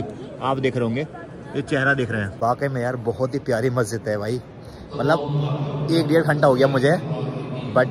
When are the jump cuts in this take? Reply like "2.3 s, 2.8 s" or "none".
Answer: 2.4 s